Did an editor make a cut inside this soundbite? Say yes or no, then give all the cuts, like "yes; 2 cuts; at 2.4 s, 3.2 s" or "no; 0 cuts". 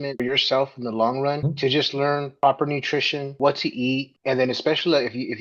yes; 1 cut; at 2.3 s